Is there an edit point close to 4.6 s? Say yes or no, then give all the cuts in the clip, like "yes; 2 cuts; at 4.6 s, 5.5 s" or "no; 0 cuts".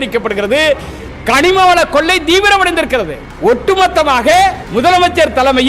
yes; 2 cuts; at 3.2 s, 4.6 s